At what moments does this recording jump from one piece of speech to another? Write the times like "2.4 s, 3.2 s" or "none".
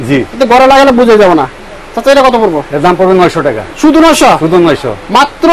none